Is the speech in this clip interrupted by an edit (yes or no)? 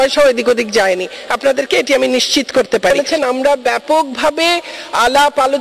yes